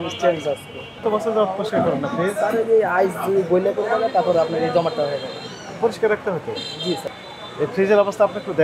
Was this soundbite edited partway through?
yes; 2 cuts; at 1.0 s, 7.1 s

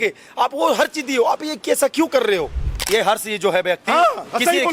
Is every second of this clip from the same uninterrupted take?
no; 1 cut; at 2.8 s

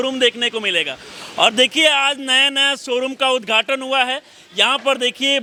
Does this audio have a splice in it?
no; 0 cuts

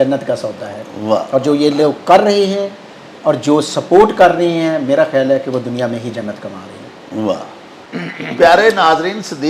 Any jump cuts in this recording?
no; 0 cuts

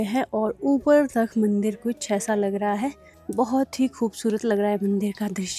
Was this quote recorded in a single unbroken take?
yes; 0 cuts

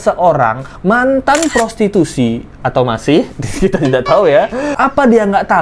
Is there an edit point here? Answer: yes; 1 cut; at 4.7 s

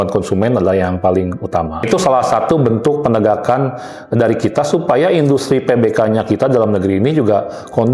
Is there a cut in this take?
yes; 1 cut; at 1.9 s

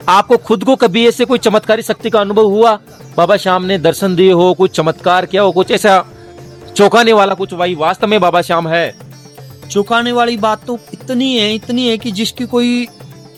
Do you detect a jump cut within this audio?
no; 0 cuts

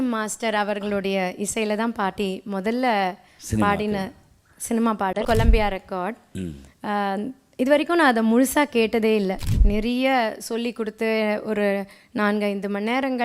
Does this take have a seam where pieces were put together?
yes; 2 cuts; at 5.2 s, 9.5 s

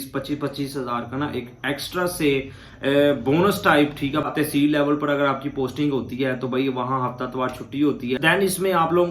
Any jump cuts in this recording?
yes; 2 cuts; at 4.3 s, 8.2 s

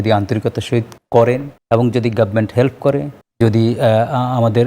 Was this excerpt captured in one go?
no; 3 cuts; at 1.0 s, 1.5 s, 3.2 s

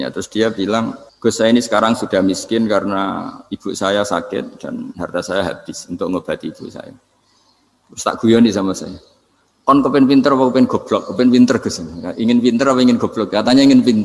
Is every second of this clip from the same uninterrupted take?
no; 1 cut; at 1.0 s

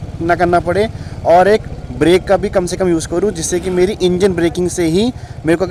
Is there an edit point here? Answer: no; 0 cuts

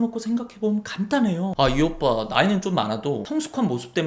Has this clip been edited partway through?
yes; 2 cuts; at 1.5 s, 3.2 s

